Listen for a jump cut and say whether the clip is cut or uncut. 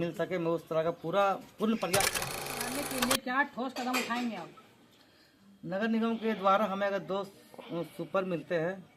cut